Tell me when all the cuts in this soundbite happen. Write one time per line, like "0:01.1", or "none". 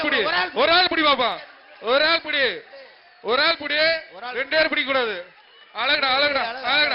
none

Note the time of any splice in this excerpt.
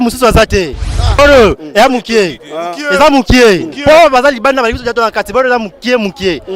0:01.2

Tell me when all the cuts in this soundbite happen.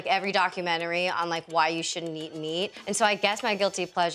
0:02.8

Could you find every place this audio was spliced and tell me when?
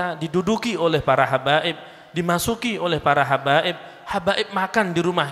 none

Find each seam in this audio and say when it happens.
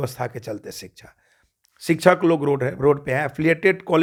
none

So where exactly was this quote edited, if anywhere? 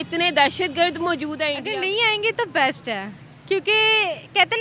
0:01.6

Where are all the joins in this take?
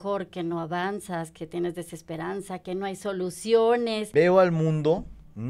0:04.0

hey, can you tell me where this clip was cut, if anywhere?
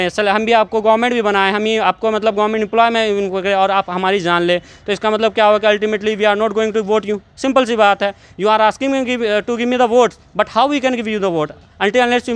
none

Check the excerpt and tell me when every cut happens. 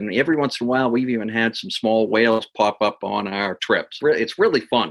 0:03.9

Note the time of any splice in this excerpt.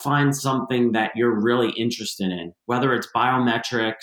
none

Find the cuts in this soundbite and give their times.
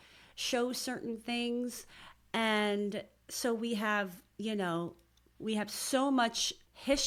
none

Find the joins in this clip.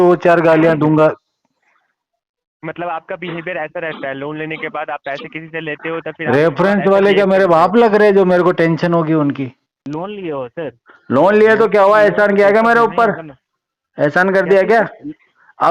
0:09.8

